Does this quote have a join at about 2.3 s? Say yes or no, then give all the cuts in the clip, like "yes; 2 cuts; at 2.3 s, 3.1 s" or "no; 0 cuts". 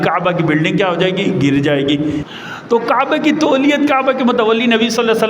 yes; 1 cut; at 2.3 s